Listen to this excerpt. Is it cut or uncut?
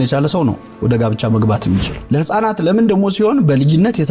cut